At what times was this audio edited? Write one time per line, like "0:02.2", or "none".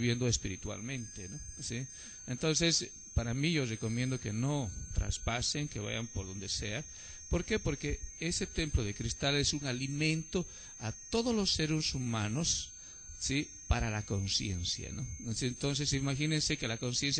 0:01.4